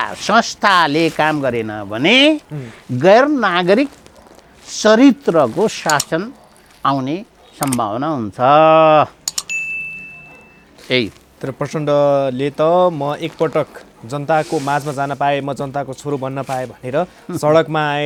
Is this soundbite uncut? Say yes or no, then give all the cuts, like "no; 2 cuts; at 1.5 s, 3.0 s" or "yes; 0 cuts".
yes; 0 cuts